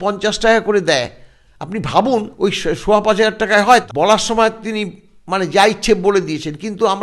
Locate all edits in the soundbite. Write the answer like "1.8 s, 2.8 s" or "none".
2.3 s, 3.8 s